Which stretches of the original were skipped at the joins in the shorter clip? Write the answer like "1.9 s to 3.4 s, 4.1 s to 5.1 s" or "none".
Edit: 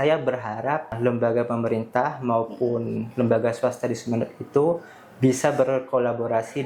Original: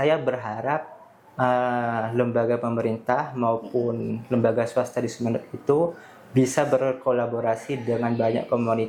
0.9 s to 2.1 s